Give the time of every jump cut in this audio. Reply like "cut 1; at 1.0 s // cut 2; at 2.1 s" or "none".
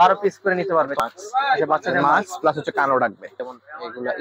cut 1; at 1.0 s // cut 2; at 3.3 s